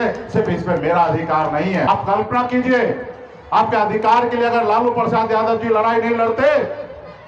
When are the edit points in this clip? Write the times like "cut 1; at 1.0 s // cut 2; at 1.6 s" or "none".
cut 1; at 1.9 s